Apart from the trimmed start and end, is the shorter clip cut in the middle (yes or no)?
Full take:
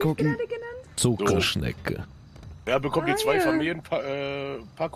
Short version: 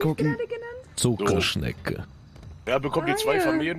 no